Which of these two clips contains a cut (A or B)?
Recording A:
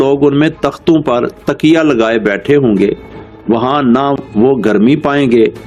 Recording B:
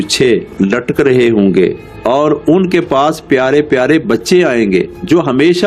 B